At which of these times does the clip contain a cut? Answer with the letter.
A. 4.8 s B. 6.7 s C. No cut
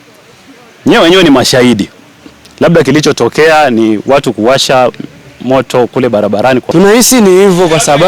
B